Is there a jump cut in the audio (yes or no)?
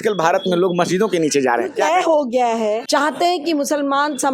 yes